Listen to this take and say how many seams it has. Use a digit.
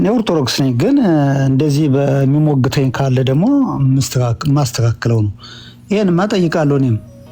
0